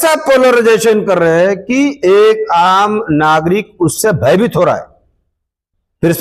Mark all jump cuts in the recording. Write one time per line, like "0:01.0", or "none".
none

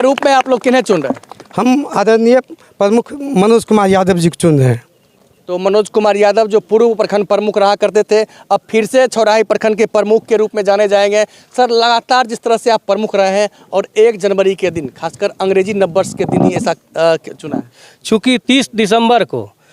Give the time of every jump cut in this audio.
none

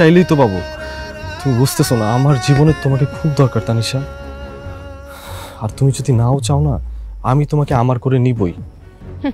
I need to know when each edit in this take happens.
0:04.0
0:05.4

